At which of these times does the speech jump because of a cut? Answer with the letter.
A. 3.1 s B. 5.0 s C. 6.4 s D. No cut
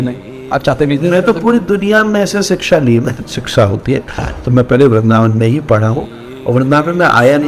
A